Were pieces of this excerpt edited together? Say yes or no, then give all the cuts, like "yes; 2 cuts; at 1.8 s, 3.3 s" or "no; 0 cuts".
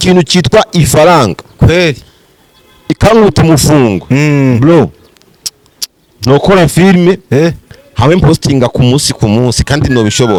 no; 0 cuts